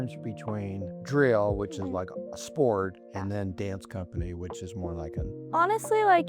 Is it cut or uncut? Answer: cut